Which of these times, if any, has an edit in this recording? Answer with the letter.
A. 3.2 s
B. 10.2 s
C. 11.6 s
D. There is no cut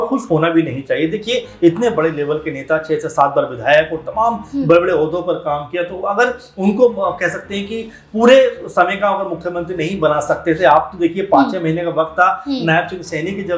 D